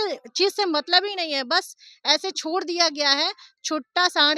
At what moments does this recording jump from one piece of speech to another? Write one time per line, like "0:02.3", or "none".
none

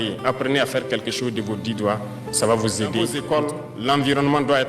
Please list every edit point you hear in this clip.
0:03.2

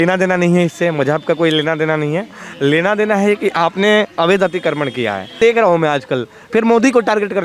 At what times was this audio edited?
0:05.4

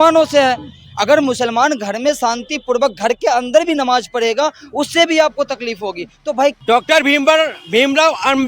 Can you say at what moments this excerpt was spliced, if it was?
0:06.6

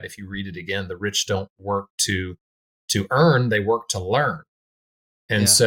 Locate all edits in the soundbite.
none

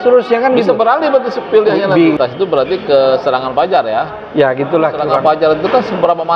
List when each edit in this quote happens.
0:02.2
0:05.1

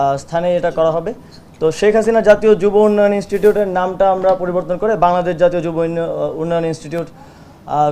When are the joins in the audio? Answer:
none

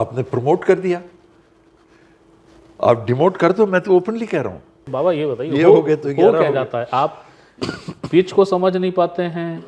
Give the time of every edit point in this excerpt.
0:04.8

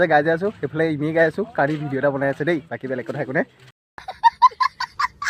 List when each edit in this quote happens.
0:03.7

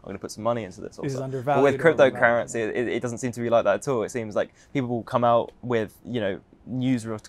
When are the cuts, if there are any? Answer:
none

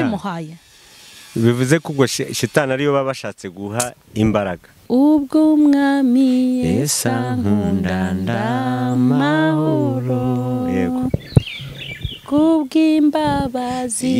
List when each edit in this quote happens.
0:04.8

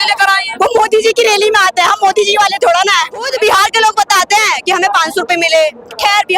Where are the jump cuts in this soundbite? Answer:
0:03.3

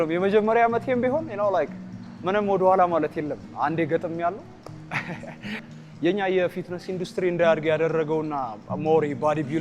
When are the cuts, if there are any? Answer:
0:05.6

